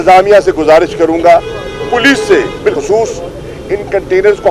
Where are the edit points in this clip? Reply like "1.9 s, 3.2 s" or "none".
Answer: none